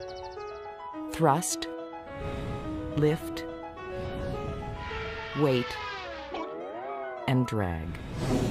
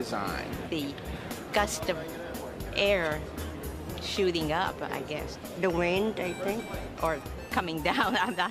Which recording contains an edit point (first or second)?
second